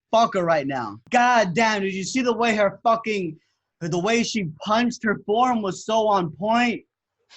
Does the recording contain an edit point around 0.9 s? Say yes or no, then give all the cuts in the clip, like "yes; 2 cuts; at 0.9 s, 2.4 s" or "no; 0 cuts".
yes; 1 cut; at 0.9 s